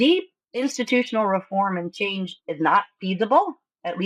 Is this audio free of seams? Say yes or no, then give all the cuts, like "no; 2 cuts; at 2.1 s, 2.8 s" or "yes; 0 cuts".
yes; 0 cuts